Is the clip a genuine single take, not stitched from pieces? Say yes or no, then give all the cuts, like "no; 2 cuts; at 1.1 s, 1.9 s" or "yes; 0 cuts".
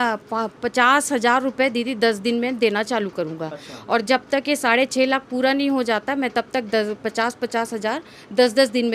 yes; 0 cuts